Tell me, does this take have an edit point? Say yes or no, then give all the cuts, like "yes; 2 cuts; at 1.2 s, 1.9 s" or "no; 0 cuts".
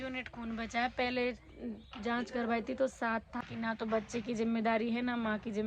yes; 1 cut; at 3.3 s